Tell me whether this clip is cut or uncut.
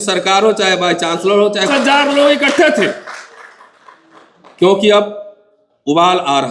cut